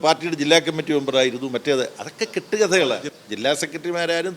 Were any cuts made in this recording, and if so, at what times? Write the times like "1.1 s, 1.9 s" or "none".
3.0 s